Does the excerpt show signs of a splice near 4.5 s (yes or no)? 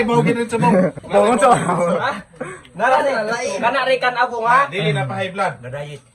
no